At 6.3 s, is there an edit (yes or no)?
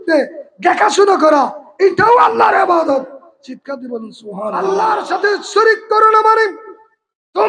no